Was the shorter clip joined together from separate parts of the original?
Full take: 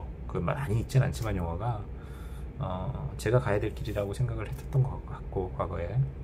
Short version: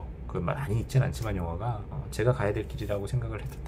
yes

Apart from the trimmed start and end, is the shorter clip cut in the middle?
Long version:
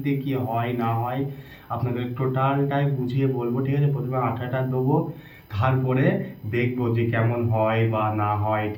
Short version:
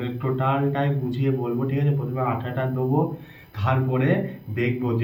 no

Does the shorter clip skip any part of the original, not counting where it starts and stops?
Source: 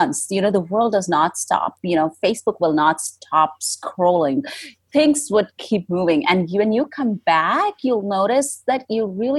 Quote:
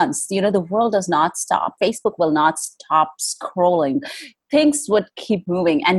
yes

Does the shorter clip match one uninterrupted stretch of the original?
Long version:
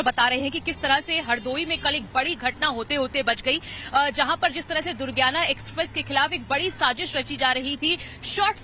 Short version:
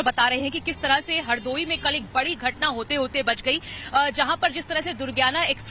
yes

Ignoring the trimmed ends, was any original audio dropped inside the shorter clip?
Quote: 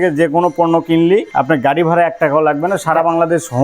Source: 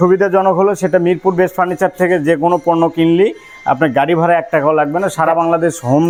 yes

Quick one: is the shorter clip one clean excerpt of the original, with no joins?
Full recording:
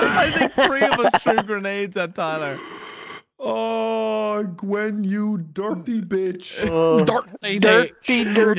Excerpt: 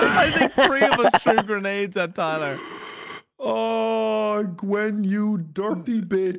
yes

